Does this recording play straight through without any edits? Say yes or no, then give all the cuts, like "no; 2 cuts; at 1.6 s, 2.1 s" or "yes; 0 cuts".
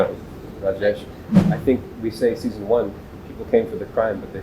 no; 1 cut; at 1.3 s